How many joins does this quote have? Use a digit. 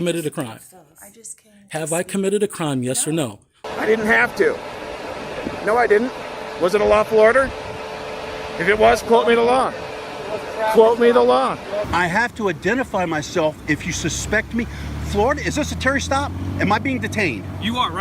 2